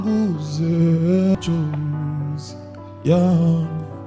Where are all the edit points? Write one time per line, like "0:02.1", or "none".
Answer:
0:01.4